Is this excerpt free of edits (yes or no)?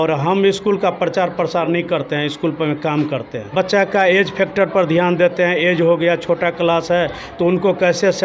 no